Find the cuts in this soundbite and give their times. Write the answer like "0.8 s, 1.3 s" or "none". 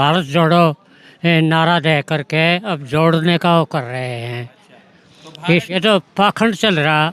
5.7 s